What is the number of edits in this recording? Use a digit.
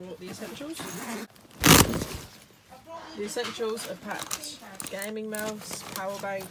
1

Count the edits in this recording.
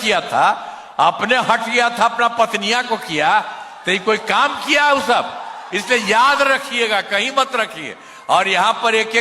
1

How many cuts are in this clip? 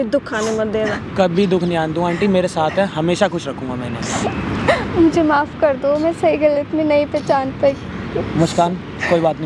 0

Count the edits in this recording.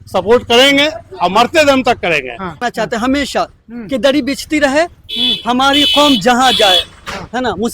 1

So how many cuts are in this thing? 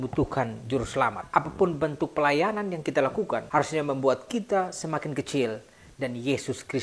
1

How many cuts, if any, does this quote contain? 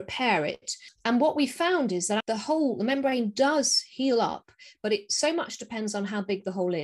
1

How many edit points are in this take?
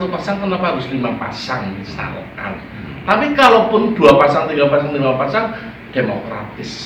0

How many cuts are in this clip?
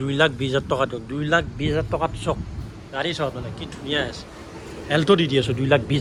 0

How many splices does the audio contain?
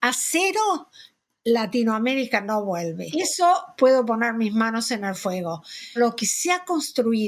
2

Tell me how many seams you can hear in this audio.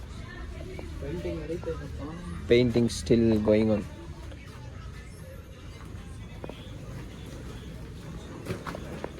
0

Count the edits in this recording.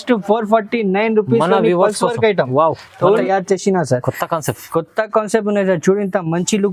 1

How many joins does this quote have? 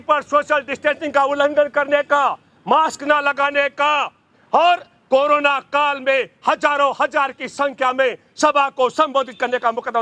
0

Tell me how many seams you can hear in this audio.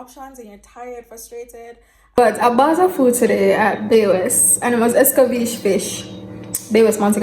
1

